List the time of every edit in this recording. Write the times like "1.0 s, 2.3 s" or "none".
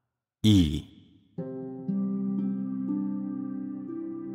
3.0 s